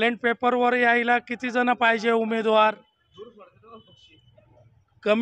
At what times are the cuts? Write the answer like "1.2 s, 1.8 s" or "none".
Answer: none